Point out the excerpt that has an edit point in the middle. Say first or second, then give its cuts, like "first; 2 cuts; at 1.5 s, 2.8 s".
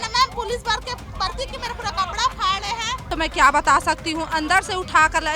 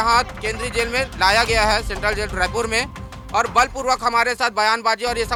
first; 1 cut; at 3.1 s